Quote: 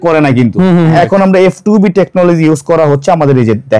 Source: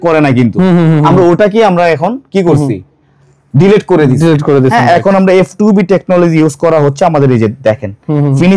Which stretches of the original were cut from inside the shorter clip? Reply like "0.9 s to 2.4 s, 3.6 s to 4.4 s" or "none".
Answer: 0.9 s to 4.9 s